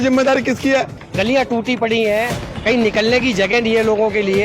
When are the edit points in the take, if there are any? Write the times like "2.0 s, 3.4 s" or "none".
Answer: 1.0 s